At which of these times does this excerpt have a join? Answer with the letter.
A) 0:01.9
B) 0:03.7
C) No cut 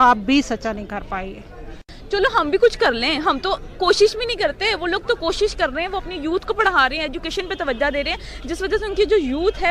A